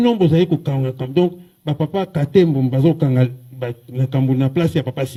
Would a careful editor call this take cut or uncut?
uncut